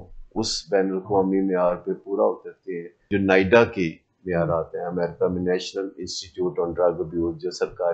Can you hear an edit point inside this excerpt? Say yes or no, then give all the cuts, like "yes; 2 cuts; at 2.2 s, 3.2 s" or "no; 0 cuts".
yes; 1 cut; at 3.1 s